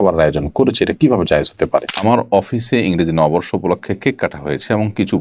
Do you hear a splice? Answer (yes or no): yes